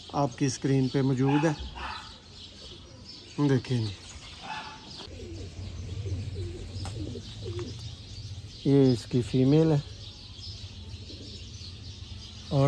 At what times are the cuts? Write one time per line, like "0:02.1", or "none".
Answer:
0:05.1